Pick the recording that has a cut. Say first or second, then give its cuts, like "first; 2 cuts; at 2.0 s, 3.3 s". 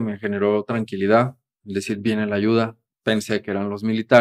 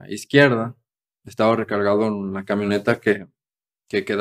first; 1 cut; at 2.8 s